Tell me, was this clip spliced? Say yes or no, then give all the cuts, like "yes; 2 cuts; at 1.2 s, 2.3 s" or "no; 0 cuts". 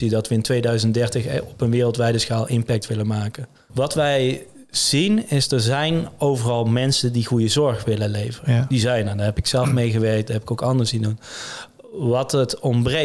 no; 0 cuts